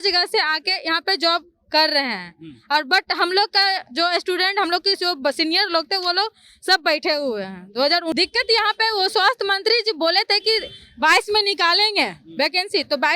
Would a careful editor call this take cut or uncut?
cut